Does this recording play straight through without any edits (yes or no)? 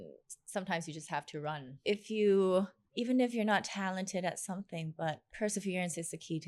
no